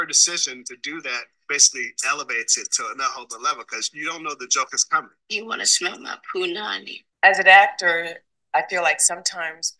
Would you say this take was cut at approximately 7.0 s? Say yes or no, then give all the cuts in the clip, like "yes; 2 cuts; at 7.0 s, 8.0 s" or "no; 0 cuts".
yes; 1 cut; at 7.0 s